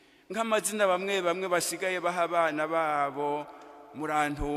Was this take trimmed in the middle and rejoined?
yes; 1 cut; at 1.0 s

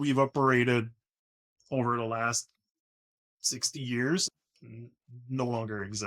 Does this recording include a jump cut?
yes; 1 cut; at 4.2 s

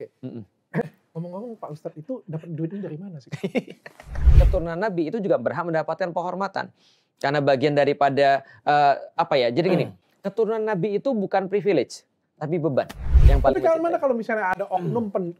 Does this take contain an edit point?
yes; 2 cuts; at 4.2 s, 13.2 s

